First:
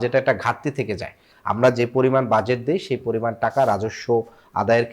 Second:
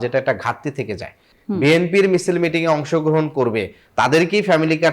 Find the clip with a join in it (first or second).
second